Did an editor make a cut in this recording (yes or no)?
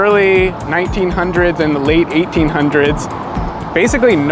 no